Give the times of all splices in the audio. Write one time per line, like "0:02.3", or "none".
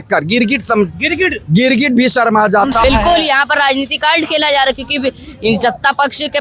0:02.8